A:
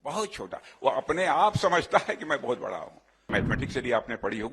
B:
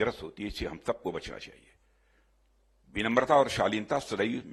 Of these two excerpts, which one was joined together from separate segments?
A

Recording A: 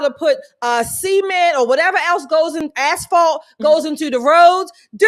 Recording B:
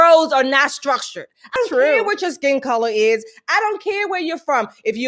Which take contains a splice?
B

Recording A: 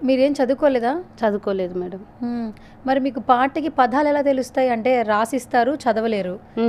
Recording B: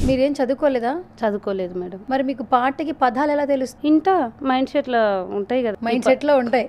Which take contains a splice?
B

